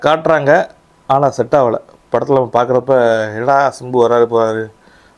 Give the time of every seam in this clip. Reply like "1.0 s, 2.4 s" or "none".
none